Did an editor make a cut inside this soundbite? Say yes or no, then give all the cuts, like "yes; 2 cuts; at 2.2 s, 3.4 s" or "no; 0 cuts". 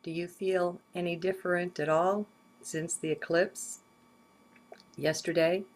no; 0 cuts